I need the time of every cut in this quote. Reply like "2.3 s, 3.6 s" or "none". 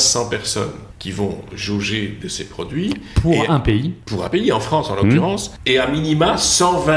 0.9 s, 1.5 s, 4.2 s, 5.5 s